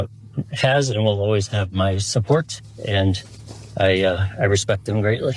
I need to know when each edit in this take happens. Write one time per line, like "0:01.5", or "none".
none